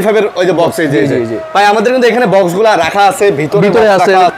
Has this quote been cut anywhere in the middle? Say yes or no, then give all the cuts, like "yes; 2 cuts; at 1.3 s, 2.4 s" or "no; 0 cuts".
no; 0 cuts